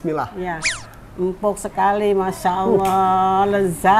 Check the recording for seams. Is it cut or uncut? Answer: uncut